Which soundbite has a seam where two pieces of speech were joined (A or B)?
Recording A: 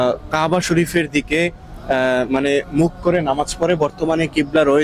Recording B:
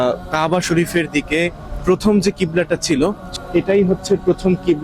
B